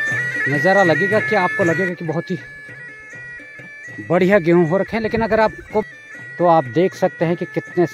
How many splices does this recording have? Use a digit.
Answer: 1